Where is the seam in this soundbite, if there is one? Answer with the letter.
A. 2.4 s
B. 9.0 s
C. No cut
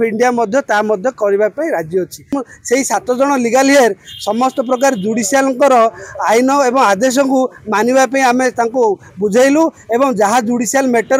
A